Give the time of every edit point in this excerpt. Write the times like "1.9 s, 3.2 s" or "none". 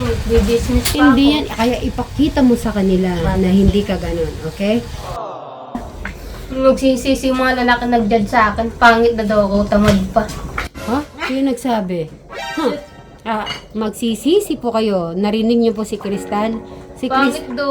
5.2 s